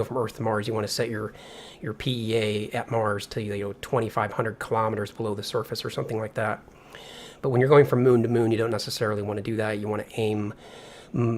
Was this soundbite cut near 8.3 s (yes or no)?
yes